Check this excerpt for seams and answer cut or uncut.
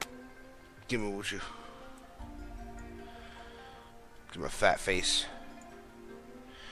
uncut